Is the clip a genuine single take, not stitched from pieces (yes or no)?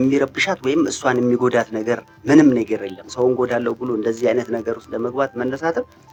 yes